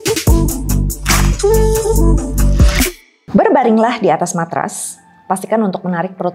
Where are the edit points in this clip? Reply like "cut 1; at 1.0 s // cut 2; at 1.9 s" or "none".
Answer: cut 1; at 3.3 s

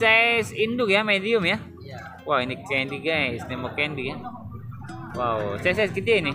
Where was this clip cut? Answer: none

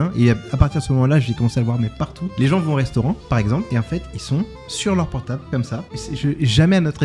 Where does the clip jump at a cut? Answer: cut 1; at 2.2 s // cut 2; at 3.7 s // cut 3; at 5.7 s

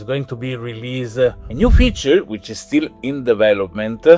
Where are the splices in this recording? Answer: cut 1; at 1.5 s

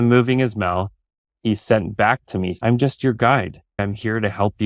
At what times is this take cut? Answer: cut 1; at 2.5 s // cut 2; at 3.7 s

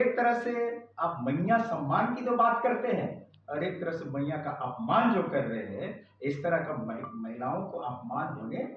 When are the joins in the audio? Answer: none

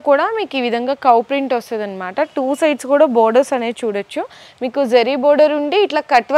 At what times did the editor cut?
none

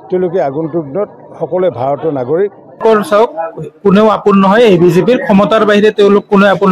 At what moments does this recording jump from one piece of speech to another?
cut 1; at 2.8 s

